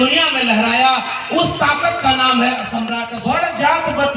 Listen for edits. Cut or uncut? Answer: cut